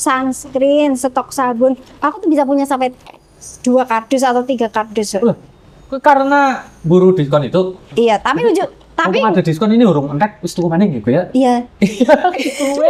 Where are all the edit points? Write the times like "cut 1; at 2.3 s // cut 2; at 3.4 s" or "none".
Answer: none